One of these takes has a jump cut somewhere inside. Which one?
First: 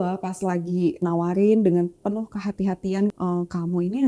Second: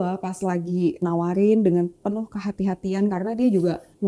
first; 1 cut; at 3.1 s

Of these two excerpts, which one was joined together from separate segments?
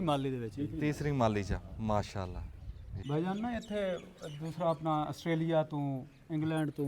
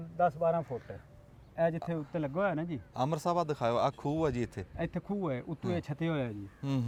first; 1 cut; at 3.0 s

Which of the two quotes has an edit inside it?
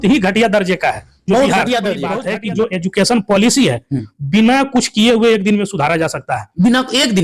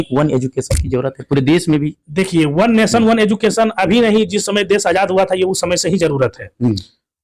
first; 1 cut; at 2.2 s

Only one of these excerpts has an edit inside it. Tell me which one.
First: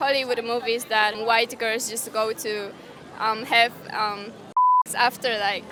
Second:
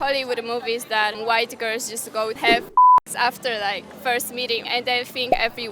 second; 2 cuts; at 2.4 s, 4.6 s

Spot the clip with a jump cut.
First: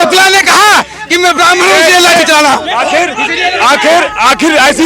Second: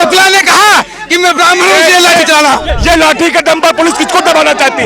second; 1 cut; at 2.7 s

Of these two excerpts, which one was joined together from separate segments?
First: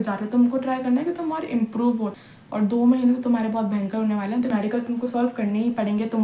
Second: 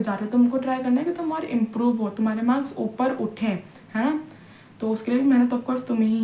first; 2 cuts; at 2.0 s, 4.5 s

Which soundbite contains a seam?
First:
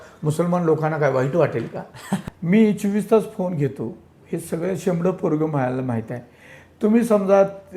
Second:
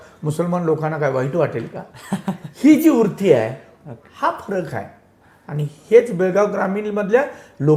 first; 1 cut; at 2.3 s

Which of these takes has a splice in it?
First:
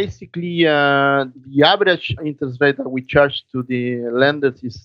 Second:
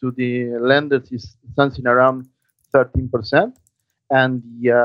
first; 2 cuts; at 1.4 s, 2.2 s

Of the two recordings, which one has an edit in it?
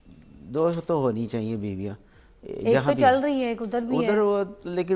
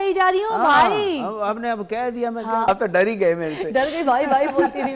second; 1 cut; at 2.6 s

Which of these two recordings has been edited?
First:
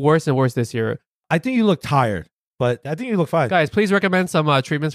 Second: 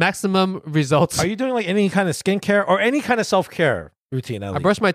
first; 1 cut; at 2.4 s

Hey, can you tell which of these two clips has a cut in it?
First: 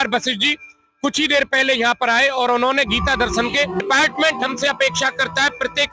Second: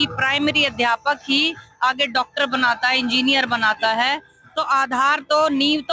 first; 1 cut; at 3.8 s

